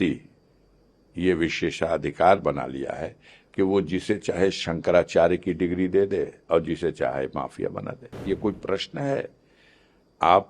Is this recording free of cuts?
no; 1 cut; at 8.3 s

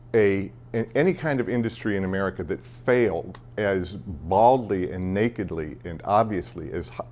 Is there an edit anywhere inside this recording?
no; 0 cuts

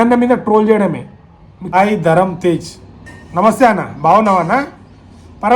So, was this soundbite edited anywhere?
yes; 1 cut; at 1.6 s

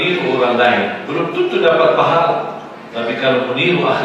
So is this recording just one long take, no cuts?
yes; 0 cuts

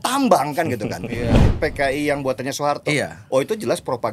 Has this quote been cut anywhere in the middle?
yes; 1 cut; at 1.5 s

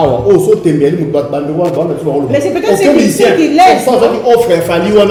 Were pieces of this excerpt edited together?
no; 0 cuts

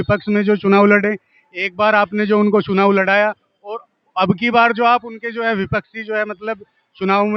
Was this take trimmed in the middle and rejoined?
no; 0 cuts

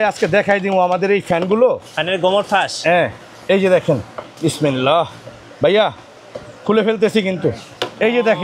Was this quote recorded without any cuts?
yes; 0 cuts

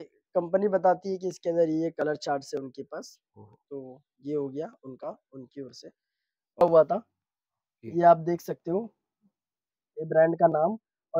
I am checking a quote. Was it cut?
yes; 1 cut; at 6.6 s

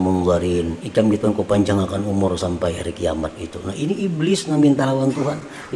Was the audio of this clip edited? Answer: no; 0 cuts

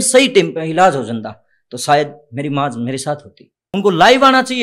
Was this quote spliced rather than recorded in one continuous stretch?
yes; 1 cut; at 3.6 s

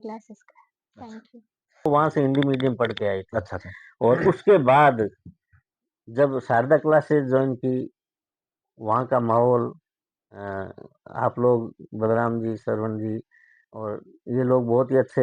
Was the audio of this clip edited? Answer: yes; 1 cut; at 1.9 s

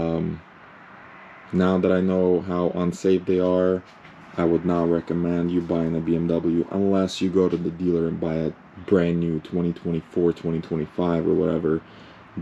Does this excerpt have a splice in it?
no; 0 cuts

